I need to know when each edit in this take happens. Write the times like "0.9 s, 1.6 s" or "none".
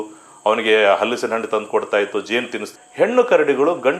2.7 s